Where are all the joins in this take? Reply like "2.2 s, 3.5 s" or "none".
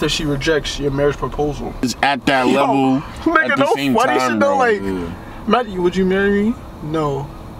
1.8 s

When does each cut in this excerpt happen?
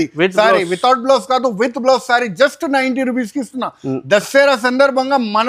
none

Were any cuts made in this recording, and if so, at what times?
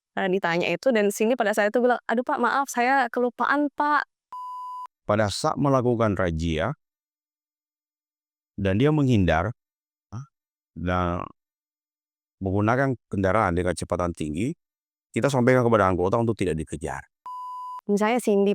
4.4 s, 17.4 s

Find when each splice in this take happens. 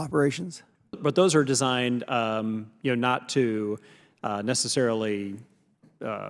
1.0 s

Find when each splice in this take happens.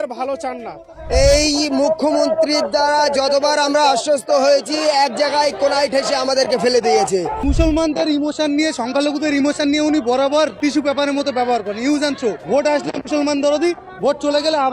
1.0 s, 7.3 s, 10.5 s, 12.4 s

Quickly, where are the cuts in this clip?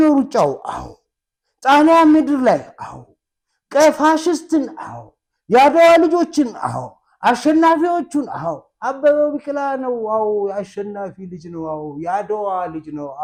none

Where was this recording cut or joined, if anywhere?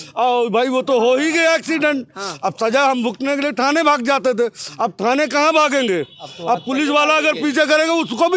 none

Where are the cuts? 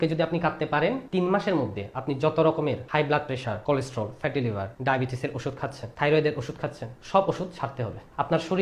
1.0 s, 3.1 s, 4.7 s

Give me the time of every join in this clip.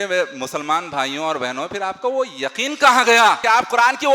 none

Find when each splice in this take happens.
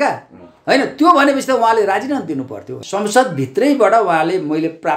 2.6 s

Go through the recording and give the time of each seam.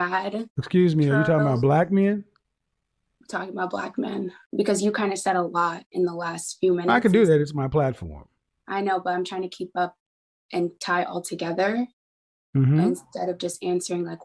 4.4 s

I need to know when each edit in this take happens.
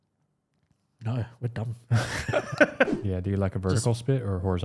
3.0 s

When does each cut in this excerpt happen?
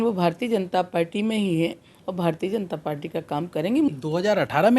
3.9 s

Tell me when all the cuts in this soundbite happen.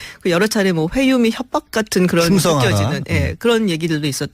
1.0 s

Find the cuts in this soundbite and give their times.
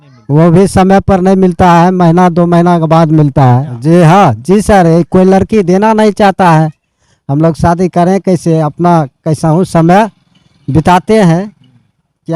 3.7 s

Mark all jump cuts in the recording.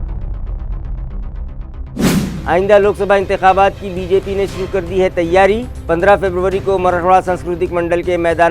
2.1 s

